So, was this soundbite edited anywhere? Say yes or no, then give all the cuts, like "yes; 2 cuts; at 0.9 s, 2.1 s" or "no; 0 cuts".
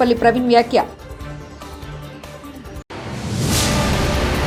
no; 0 cuts